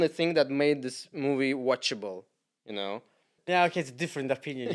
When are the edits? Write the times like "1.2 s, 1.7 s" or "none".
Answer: none